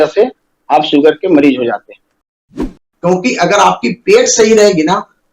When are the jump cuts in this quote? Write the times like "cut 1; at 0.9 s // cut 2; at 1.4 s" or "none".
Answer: cut 1; at 2.6 s